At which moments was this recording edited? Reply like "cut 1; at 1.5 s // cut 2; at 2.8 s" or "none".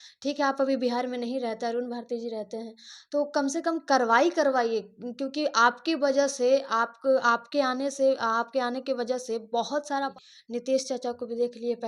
cut 1; at 10.1 s